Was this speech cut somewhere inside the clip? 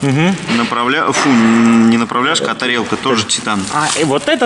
no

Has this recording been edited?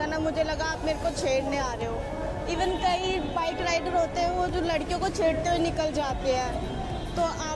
no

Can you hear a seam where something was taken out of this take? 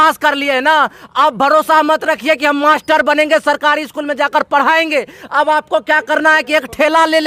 no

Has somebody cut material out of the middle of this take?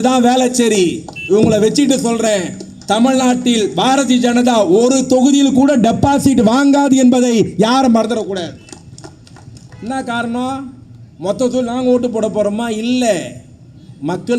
no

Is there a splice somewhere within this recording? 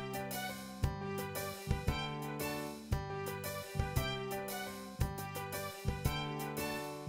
no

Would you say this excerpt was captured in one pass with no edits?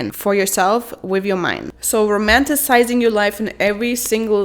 no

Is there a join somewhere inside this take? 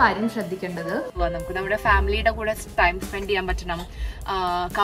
yes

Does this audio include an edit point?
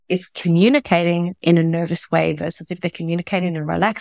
no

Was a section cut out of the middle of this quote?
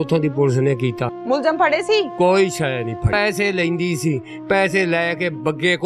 yes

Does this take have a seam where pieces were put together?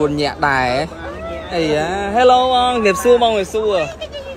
yes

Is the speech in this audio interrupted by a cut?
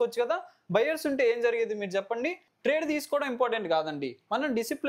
yes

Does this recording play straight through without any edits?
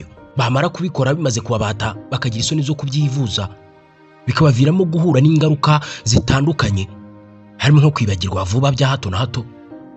yes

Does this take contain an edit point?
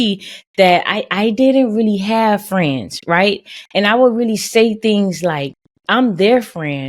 no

